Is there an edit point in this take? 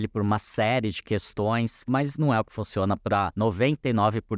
yes; 2 cuts; at 1.9 s, 3.3 s

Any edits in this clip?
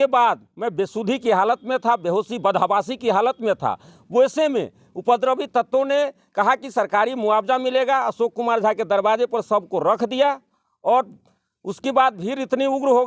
no; 0 cuts

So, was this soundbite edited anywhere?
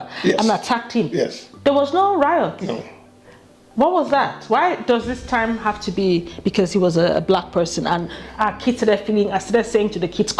no; 0 cuts

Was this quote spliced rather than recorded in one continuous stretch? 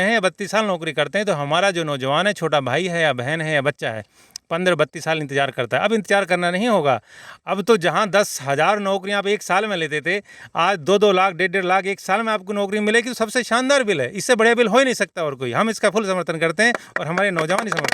no; 0 cuts

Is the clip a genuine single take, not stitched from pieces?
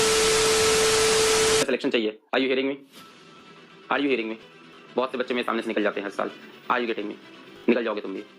no; 1 cut; at 1.7 s

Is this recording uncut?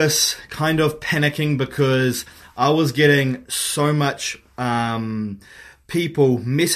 yes; 0 cuts

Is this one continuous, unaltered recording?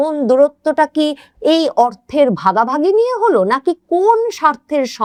yes; 0 cuts

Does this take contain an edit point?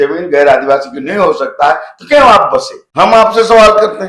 yes; 1 cut; at 2.8 s

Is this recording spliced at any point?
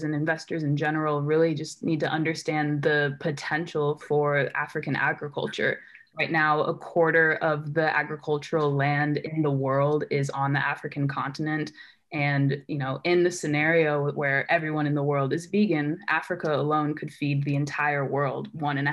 no; 0 cuts

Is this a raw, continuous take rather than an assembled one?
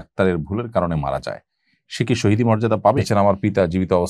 no; 1 cut; at 3.1 s

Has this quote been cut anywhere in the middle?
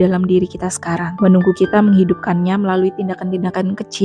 no; 0 cuts

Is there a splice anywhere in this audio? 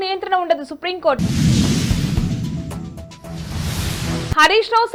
no; 0 cuts

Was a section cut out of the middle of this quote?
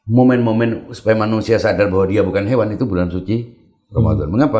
no; 0 cuts

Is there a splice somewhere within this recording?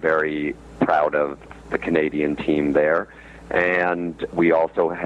yes; 2 cuts; at 1.5 s, 4.3 s

